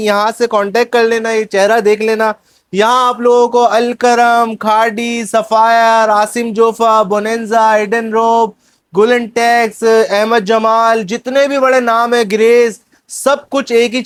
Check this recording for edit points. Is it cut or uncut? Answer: uncut